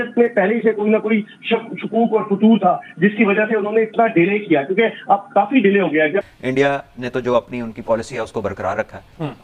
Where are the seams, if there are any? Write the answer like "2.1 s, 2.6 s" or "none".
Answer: 6.3 s